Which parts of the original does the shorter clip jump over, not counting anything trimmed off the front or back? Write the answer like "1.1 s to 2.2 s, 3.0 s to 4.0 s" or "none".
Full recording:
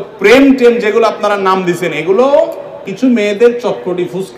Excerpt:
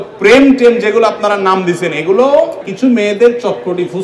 2.6 s to 2.8 s